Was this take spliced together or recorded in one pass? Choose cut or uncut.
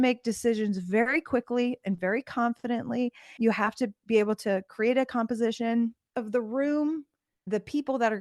cut